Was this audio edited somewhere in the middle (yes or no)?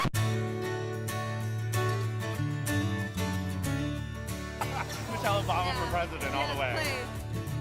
no